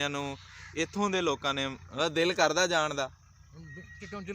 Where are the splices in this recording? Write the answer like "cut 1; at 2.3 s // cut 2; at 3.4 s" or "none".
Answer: cut 1; at 1.8 s